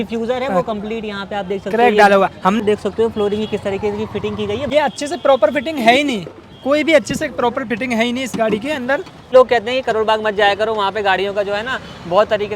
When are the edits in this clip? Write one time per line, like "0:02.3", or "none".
0:02.6
0:04.6
0:09.3